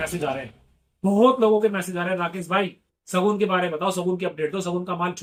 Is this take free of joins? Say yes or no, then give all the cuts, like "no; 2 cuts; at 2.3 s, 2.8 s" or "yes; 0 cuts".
yes; 0 cuts